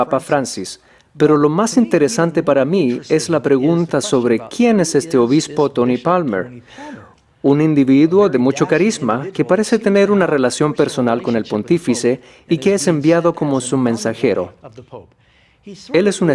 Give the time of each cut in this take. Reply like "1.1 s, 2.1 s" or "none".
14.7 s